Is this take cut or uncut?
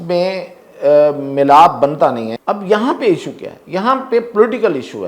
cut